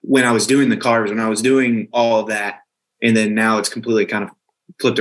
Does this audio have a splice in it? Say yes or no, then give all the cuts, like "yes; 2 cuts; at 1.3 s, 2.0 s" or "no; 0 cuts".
no; 0 cuts